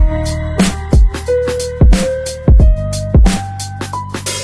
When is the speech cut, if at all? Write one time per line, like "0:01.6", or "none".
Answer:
none

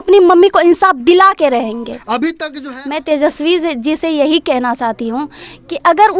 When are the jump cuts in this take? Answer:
0:02.5

